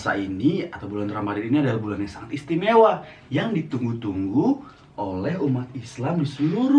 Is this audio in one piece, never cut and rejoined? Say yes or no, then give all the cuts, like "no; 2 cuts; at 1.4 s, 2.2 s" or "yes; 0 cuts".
yes; 0 cuts